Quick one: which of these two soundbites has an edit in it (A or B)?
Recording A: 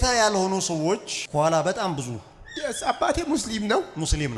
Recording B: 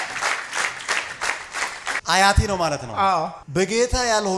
B